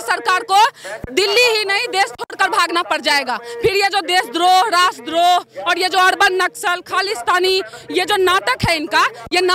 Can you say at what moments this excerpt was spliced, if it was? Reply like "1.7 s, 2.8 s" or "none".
none